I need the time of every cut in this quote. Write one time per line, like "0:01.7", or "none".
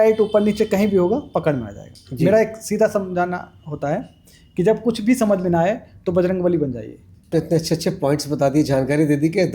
0:07.3

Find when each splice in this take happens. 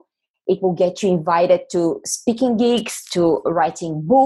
none

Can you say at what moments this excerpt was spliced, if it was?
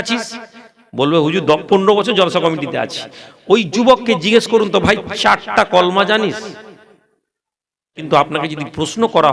0:08.0

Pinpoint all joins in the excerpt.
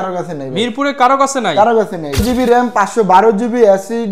0:02.0

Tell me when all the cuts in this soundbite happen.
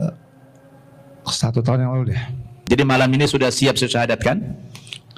0:02.7

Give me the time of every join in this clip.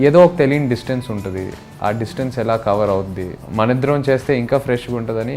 0:03.4

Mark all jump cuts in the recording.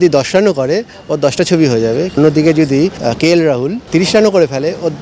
0:02.2
0:03.0
0:03.8

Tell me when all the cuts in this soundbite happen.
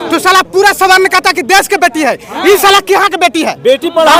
none

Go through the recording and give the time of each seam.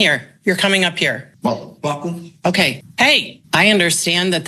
0:01.3
0:03.3

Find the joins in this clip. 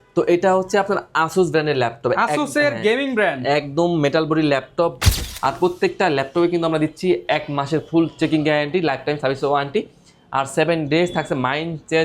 0:05.0

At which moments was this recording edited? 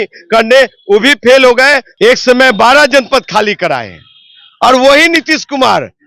0:01.9

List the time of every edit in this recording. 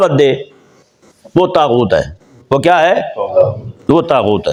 none

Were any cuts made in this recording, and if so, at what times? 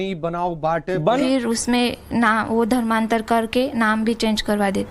0:01.2

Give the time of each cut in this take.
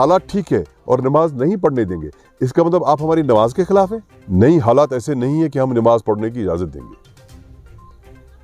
0:04.2

